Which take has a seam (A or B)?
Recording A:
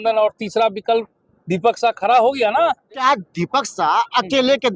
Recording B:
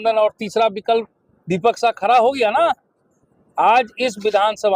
A